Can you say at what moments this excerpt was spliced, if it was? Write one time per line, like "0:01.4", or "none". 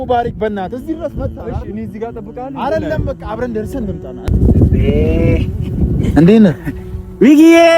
0:04.3